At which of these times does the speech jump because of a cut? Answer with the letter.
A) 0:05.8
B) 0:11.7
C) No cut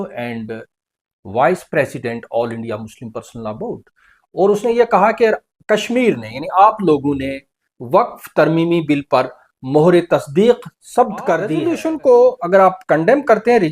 B